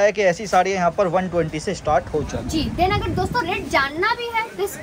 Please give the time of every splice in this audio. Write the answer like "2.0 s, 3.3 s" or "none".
none